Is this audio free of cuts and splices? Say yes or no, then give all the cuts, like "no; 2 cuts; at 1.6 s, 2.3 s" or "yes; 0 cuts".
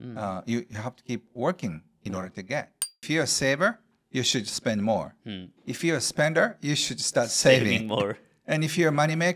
no; 1 cut; at 3.0 s